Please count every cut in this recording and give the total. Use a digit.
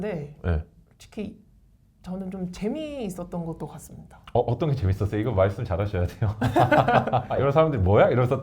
1